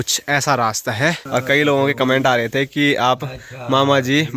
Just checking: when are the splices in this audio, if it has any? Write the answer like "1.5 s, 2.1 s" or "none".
1.2 s